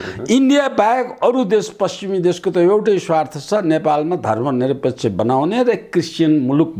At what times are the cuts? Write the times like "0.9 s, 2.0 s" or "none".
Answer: none